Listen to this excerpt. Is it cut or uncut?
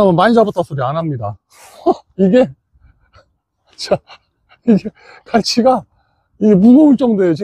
uncut